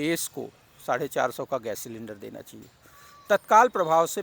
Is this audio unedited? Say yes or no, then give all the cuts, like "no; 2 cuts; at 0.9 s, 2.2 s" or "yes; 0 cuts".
yes; 0 cuts